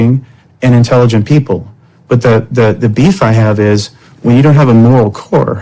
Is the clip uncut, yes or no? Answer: yes